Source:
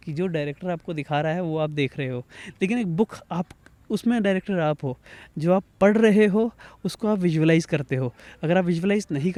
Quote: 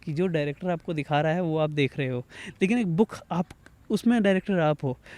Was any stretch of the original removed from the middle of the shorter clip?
no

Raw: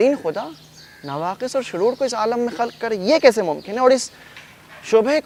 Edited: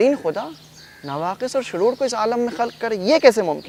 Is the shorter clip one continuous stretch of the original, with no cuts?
yes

